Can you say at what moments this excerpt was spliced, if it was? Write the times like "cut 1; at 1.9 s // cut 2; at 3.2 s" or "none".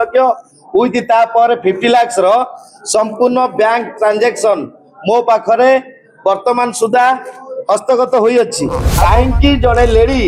cut 1; at 8.9 s

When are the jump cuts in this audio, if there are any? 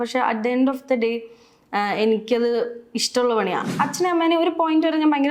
cut 1; at 3.7 s

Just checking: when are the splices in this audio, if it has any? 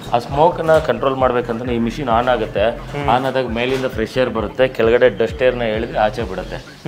none

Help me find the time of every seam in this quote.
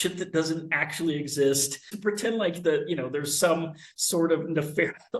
cut 1; at 1.9 s

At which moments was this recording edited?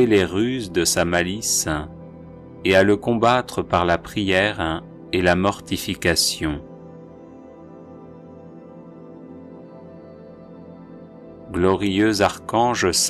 cut 1; at 6.8 s // cut 2; at 11.5 s

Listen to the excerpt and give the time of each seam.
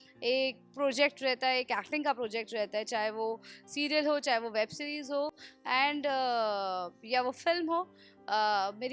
none

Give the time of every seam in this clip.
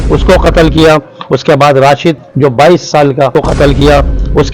cut 1; at 2.3 s // cut 2; at 3.3 s

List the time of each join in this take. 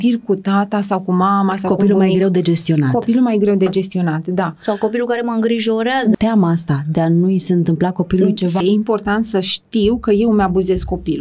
cut 1; at 6.1 s // cut 2; at 8.6 s

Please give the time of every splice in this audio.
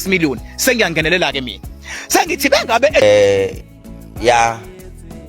cut 1; at 3.0 s

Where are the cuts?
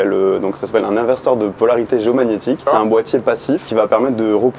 cut 1; at 1.5 s // cut 2; at 2.7 s // cut 3; at 3.7 s

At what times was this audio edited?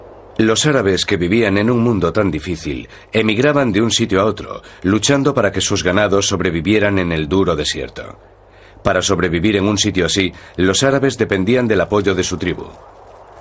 cut 1; at 11.4 s

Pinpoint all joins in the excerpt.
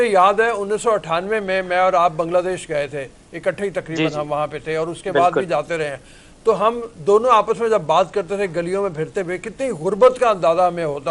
none

